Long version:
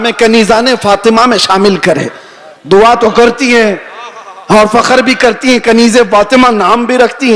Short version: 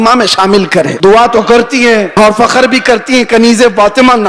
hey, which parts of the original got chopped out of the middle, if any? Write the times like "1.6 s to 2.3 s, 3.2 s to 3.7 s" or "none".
2.0 s to 2.6 s, 3.8 s to 4.4 s

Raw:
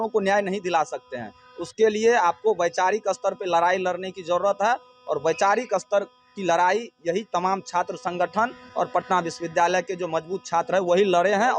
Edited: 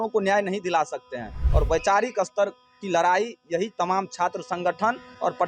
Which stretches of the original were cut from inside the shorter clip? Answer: 1.4 s to 4.9 s

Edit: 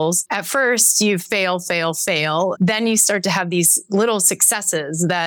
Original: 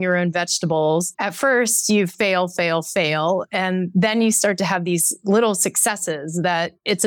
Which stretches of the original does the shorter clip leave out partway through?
3.4 s to 3.9 s

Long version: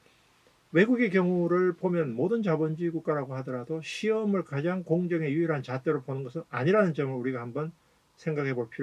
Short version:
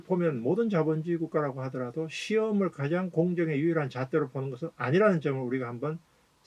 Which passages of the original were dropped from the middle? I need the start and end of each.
none

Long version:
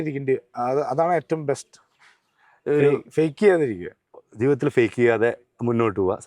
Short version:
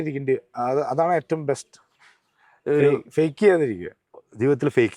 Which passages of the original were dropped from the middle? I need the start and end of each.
none

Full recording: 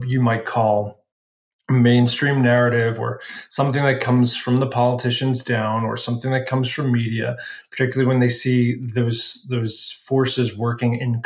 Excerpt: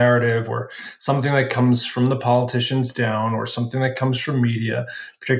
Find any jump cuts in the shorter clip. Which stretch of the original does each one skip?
none

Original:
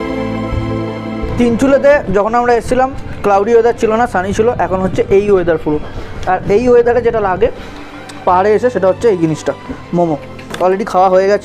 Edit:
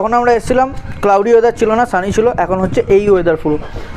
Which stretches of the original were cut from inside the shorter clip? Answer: none

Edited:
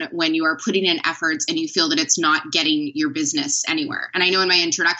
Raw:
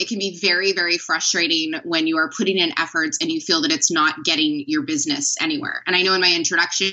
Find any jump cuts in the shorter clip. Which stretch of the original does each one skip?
none

